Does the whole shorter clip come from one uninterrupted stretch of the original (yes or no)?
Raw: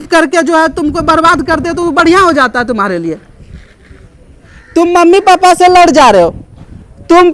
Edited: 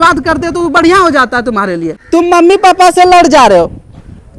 no